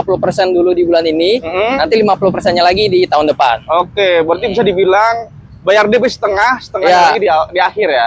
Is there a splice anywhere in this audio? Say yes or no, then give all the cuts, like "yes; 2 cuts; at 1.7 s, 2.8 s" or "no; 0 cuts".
no; 0 cuts